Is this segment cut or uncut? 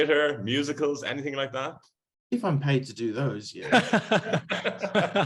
uncut